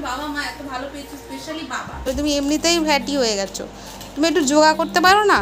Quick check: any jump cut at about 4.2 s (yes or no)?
no